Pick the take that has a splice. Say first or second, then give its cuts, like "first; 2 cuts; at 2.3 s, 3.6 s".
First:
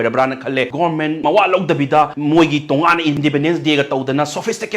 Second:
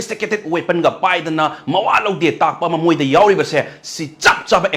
first; 3 cuts; at 0.9 s, 2.1 s, 3.1 s